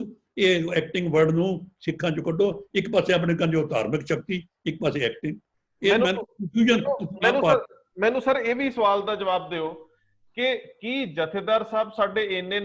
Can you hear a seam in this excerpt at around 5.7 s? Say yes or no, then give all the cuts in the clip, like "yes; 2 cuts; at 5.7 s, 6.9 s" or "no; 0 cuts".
no; 0 cuts